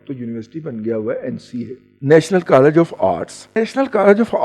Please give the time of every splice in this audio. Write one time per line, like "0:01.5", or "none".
0:01.9
0:03.5